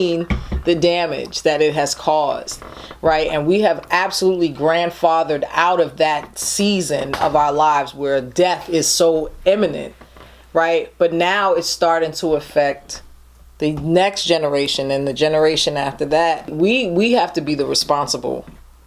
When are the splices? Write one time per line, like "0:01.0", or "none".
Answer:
0:16.5